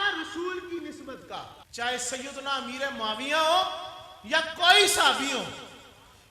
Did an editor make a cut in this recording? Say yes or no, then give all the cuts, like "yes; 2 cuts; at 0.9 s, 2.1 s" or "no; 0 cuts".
yes; 1 cut; at 1.6 s